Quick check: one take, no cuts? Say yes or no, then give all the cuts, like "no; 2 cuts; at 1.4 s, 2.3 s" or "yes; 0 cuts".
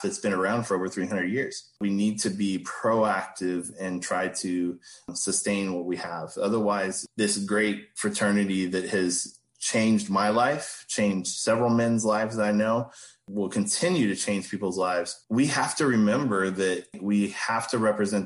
no; 3 cuts; at 1.8 s, 7.9 s, 15.2 s